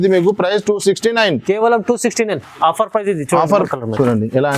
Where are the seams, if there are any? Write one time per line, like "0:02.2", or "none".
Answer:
0:03.6